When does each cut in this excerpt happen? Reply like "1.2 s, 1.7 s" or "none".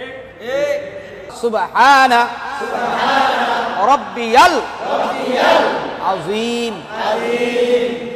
1.3 s